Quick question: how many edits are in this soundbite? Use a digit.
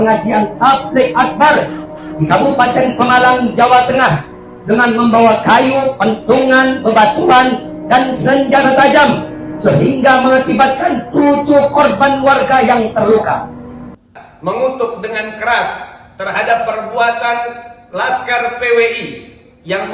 1